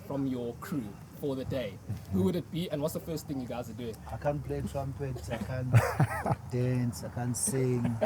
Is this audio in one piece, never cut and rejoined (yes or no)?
no